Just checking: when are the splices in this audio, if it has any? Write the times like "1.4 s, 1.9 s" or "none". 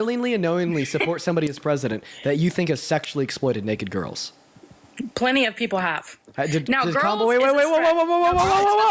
none

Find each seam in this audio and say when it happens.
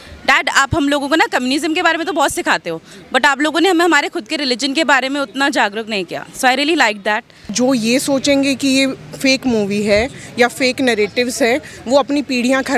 7.5 s

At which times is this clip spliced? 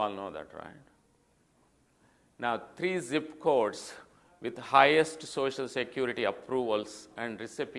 2.4 s

